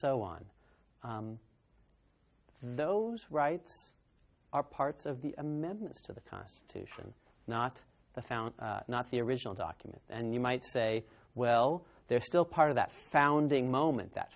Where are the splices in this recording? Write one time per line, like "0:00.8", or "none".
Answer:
0:03.5